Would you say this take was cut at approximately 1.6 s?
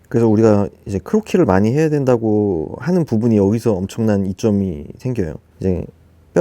no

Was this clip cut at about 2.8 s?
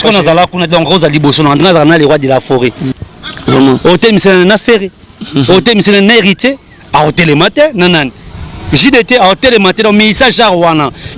yes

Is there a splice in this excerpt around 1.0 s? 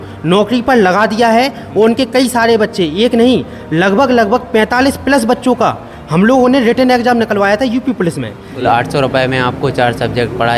no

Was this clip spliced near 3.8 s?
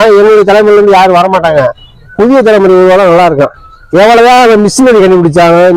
yes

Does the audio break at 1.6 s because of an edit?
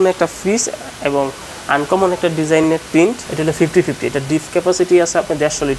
no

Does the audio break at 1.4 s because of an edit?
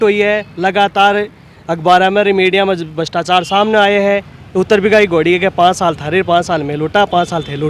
no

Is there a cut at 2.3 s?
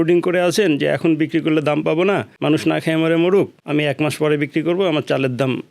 yes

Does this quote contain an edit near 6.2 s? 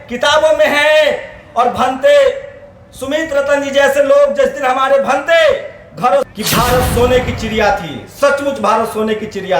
yes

